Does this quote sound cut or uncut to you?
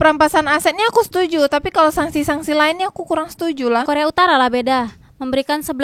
cut